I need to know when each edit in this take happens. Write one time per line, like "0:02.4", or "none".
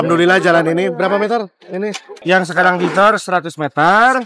0:02.1